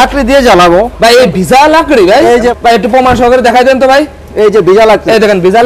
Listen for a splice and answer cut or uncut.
cut